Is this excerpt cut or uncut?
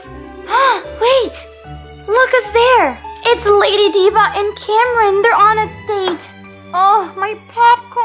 uncut